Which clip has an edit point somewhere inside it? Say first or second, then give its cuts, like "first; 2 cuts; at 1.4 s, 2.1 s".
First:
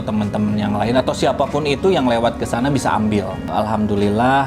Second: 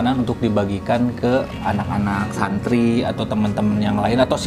first; 1 cut; at 3.4 s